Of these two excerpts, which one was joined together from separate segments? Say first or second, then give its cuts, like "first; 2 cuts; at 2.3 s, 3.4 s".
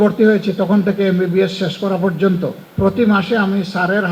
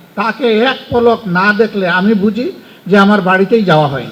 first; 1 cut; at 2.6 s